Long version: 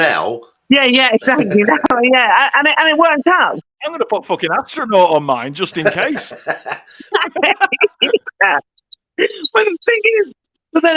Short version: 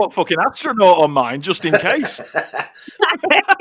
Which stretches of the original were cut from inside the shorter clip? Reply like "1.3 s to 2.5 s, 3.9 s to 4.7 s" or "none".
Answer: none